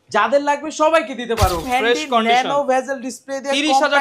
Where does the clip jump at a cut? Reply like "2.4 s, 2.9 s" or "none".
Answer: 1.6 s